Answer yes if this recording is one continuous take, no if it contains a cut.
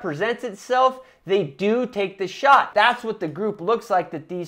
no